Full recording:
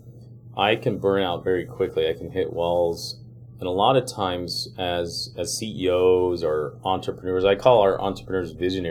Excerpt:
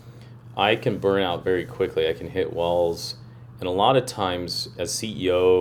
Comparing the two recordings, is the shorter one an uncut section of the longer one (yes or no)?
no